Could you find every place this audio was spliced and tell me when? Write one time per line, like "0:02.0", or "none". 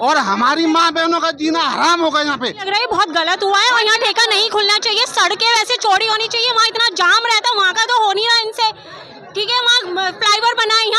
0:02.6